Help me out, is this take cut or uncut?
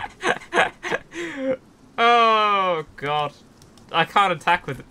uncut